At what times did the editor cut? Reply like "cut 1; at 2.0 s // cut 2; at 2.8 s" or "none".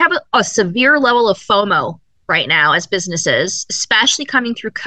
none